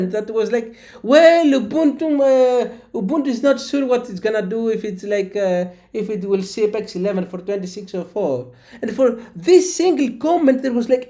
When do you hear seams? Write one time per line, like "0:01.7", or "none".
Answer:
none